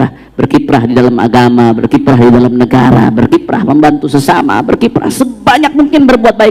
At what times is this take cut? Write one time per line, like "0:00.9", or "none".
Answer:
none